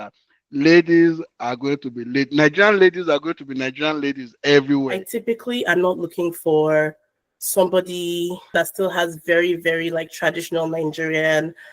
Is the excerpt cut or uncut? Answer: cut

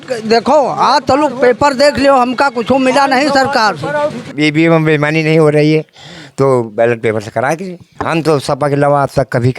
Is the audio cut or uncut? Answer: cut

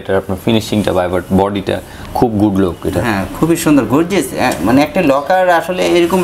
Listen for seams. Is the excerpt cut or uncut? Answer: uncut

